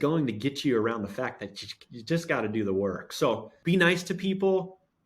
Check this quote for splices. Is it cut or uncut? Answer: cut